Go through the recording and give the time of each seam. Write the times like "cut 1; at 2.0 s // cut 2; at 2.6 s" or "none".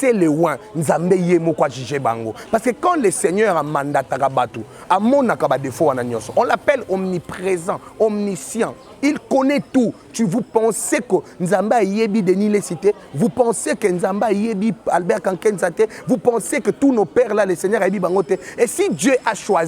none